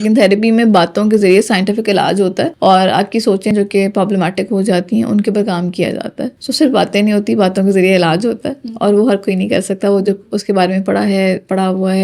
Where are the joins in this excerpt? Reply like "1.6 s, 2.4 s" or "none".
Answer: none